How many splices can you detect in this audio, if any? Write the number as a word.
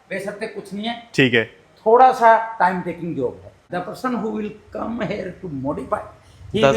one